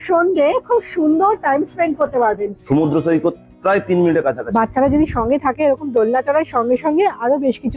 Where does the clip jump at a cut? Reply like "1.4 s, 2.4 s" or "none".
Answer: 2.5 s, 4.4 s